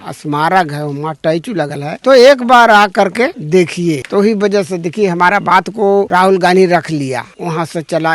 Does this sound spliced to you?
yes; 2 cuts; at 6.1 s, 7.3 s

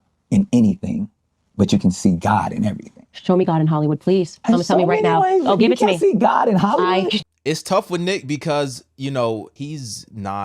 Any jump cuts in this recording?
yes; 2 cuts; at 7.2 s, 9.5 s

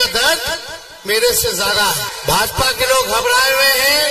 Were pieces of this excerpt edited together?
yes; 1 cut; at 2.1 s

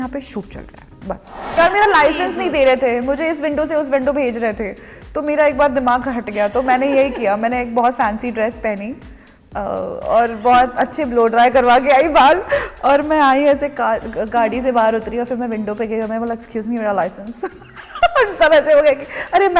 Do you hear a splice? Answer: yes; 1 cut; at 1.3 s

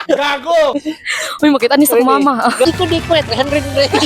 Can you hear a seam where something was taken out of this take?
yes; 1 cut; at 2.6 s

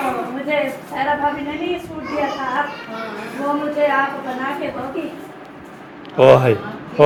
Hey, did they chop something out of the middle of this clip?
no; 0 cuts

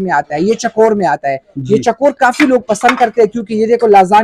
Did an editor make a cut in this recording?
no; 0 cuts

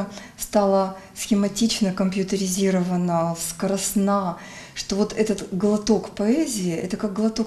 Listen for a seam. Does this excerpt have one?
no; 0 cuts

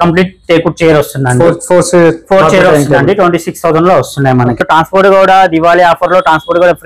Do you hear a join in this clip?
yes; 1 cut; at 4.6 s

